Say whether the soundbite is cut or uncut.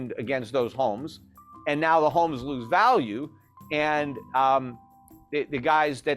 uncut